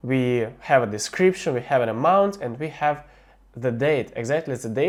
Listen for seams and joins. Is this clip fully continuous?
yes; 0 cuts

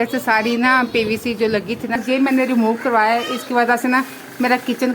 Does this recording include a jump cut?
yes; 1 cut; at 2.0 s

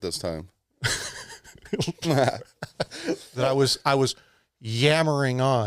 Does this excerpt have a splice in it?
yes; 1 cut; at 3.3 s

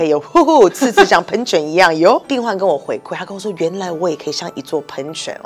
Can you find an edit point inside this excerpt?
yes; 1 cut; at 2.3 s

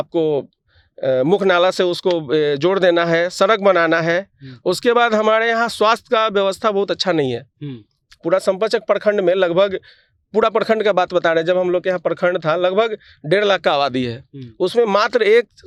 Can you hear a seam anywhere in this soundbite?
no; 0 cuts

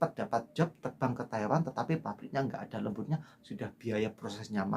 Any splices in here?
yes; 1 cut; at 3.3 s

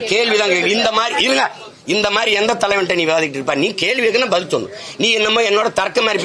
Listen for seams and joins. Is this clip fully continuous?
yes; 0 cuts

